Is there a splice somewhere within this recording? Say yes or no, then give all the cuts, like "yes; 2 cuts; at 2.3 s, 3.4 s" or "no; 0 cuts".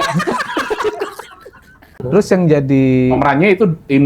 yes; 1 cut; at 2.0 s